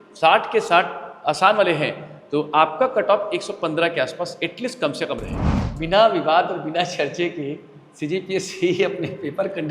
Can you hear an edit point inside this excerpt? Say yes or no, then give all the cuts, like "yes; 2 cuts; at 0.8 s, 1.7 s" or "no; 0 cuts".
yes; 1 cut; at 5.7 s